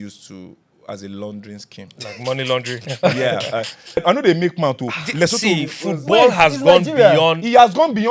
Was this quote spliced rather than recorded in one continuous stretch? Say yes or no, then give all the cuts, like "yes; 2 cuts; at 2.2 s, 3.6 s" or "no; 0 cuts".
yes; 1 cut; at 4.0 s